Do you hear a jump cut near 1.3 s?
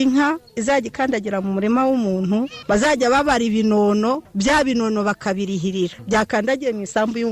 no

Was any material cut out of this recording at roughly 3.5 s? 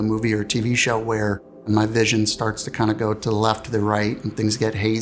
no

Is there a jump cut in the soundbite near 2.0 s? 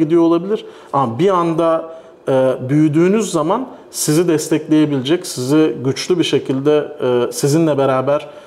no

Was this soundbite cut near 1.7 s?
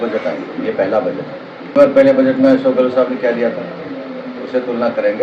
yes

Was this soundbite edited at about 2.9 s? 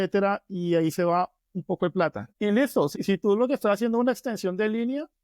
yes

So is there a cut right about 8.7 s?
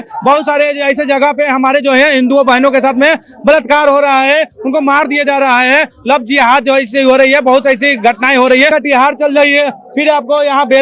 yes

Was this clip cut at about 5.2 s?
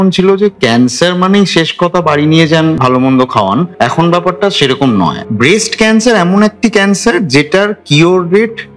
yes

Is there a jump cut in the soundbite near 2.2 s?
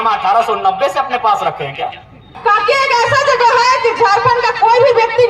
yes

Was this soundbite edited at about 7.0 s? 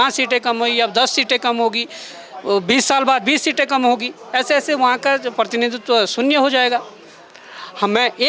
no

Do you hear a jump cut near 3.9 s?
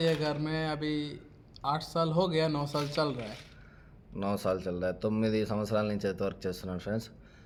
no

